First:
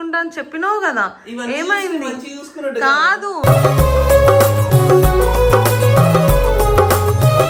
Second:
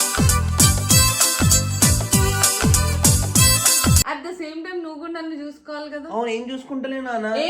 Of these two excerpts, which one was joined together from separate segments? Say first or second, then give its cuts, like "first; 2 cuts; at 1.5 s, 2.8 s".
second; 1 cut; at 4.0 s